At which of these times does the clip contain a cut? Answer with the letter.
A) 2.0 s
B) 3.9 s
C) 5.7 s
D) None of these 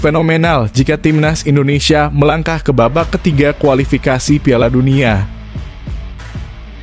C